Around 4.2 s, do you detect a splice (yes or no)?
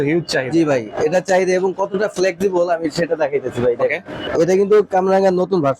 yes